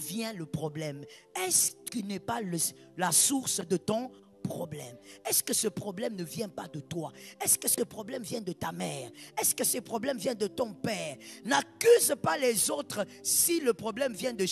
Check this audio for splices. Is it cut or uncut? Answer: uncut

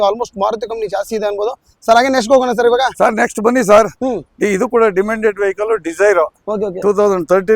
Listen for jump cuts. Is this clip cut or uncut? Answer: uncut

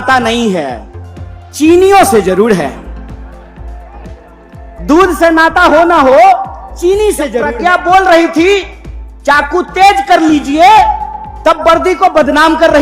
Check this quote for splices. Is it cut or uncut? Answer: cut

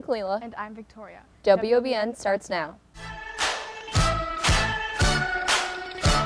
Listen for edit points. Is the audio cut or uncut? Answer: uncut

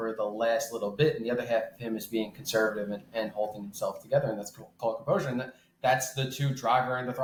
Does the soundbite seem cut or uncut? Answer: uncut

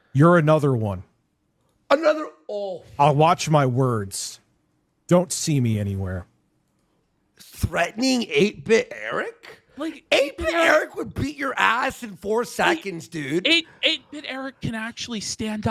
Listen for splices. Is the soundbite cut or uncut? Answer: uncut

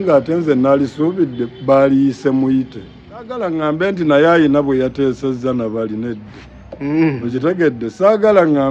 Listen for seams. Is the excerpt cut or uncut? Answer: cut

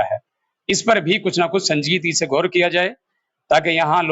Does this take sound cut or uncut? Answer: uncut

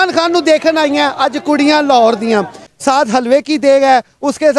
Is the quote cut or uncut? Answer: cut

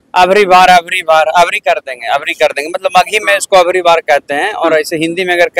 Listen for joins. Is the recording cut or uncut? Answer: uncut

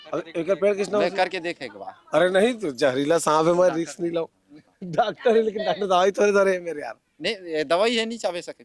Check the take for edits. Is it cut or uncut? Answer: uncut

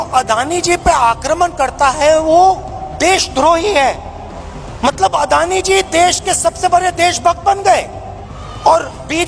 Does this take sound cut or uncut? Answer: uncut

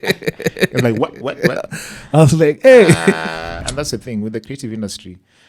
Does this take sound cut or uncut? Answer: cut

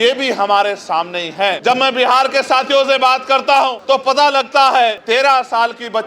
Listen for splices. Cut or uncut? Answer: cut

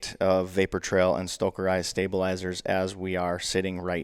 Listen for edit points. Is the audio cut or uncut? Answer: uncut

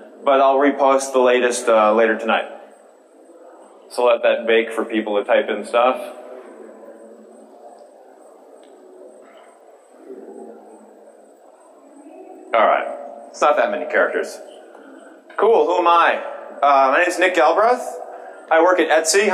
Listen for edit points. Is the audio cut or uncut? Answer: cut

